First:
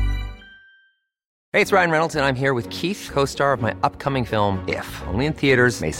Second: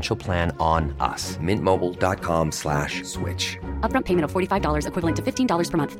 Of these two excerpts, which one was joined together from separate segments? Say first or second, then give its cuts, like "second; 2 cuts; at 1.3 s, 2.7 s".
first; 1 cut; at 1.3 s